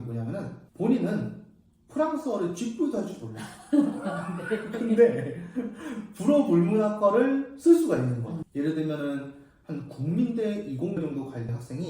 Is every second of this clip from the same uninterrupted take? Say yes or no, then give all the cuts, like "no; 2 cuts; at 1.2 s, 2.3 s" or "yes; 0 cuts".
no; 1 cut; at 8.4 s